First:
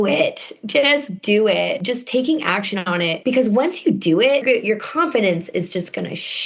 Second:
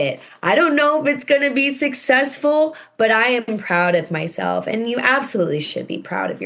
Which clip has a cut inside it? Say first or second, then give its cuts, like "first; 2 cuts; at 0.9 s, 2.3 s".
first; 3 cuts; at 1.8 s, 3.2 s, 4.4 s